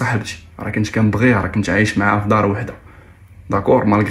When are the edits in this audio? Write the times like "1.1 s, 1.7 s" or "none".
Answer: none